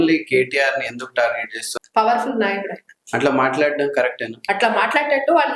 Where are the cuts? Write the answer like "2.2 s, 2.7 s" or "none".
1.7 s, 4.4 s